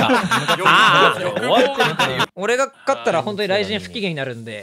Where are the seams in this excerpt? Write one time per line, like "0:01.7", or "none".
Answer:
0:02.2